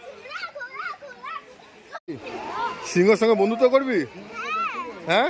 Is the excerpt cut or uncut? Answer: cut